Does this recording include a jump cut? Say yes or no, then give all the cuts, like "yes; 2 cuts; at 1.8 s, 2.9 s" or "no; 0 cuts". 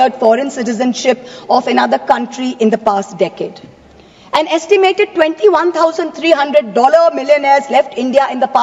no; 0 cuts